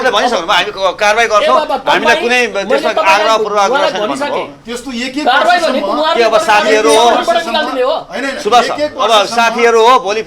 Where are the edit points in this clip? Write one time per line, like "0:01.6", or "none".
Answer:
0:04.6